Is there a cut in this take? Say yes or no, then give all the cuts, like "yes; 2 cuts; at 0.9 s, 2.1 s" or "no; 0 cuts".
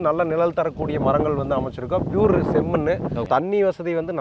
yes; 1 cut; at 3.3 s